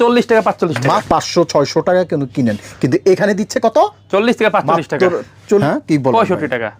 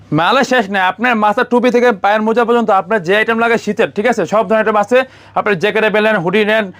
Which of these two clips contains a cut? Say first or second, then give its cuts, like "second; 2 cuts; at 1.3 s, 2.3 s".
first; 2 cuts; at 1.0 s, 5.6 s